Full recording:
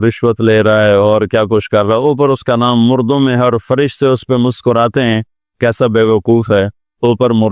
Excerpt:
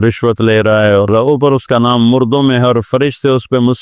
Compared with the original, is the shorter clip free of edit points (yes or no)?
no